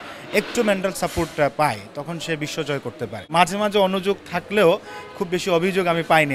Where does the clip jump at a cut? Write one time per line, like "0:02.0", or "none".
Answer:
0:03.2